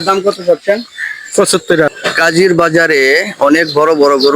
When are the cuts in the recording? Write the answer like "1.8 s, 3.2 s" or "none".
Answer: 2.0 s